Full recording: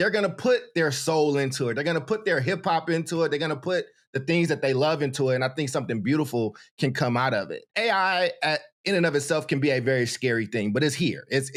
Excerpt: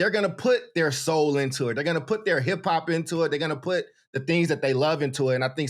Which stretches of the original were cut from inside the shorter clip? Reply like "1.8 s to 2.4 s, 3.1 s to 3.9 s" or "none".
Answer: none